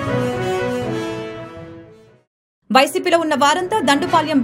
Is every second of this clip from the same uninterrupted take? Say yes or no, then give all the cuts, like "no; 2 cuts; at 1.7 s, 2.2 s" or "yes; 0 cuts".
yes; 0 cuts